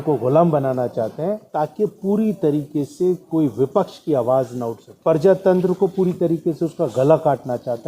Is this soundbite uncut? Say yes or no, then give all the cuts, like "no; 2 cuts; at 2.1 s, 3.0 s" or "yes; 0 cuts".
no; 2 cuts; at 1.4 s, 4.8 s